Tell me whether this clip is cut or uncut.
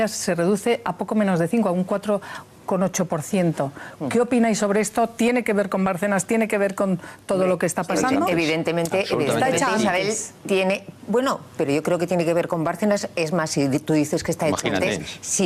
uncut